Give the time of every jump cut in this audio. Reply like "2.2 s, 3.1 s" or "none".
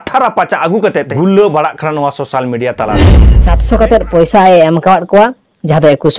1.0 s, 3.2 s